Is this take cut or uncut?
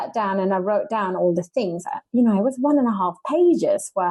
uncut